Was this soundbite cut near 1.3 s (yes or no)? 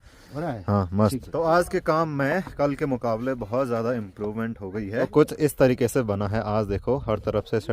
yes